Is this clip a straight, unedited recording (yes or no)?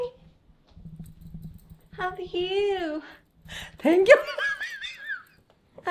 yes